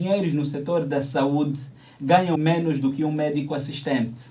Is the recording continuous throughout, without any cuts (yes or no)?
no